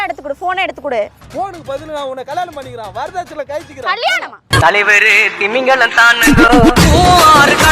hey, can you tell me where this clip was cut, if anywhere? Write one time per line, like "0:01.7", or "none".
0:01.2